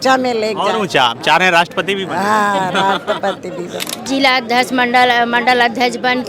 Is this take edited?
yes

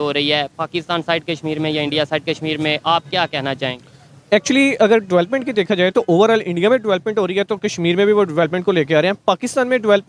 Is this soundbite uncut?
yes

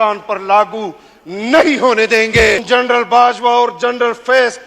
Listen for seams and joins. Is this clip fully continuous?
no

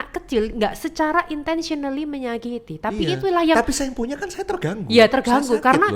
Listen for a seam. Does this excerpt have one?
no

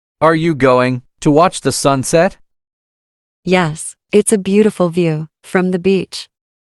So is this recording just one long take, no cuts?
yes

